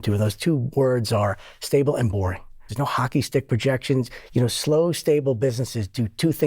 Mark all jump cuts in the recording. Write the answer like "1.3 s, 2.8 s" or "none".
2.7 s